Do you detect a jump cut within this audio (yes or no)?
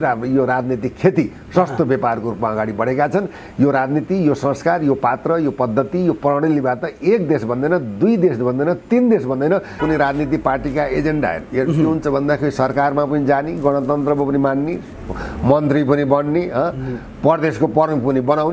yes